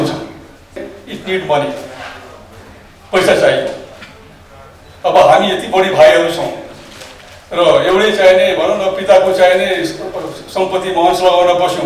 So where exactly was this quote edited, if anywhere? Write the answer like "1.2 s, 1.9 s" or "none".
0.9 s